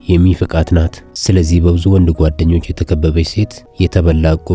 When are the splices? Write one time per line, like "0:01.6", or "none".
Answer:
0:01.1
0:03.6